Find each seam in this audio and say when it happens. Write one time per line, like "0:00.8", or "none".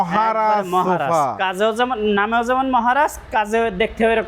none